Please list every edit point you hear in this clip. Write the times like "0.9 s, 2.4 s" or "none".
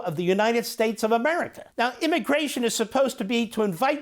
1.6 s